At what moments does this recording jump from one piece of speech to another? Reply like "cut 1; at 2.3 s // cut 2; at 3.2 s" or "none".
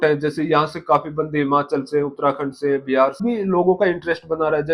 cut 1; at 3.2 s